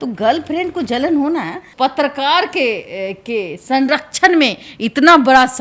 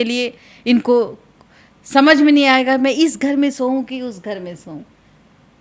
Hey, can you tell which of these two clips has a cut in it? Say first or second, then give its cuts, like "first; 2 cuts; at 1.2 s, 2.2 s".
first; 1 cut; at 1.7 s